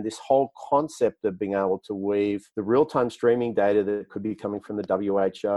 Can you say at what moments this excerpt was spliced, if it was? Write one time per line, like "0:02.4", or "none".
0:02.5